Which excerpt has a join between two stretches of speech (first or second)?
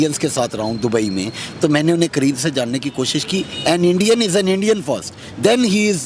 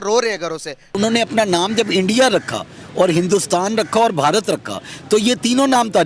second